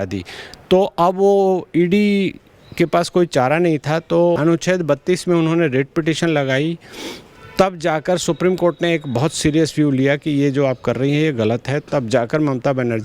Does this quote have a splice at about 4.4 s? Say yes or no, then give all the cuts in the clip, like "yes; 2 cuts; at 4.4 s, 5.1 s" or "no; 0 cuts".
yes; 1 cut; at 4.4 s